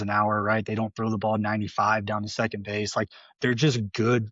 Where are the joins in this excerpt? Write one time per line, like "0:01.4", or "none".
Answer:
none